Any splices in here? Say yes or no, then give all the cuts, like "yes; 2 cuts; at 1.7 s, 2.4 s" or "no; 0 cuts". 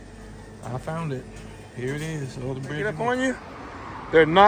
yes; 1 cut; at 2.8 s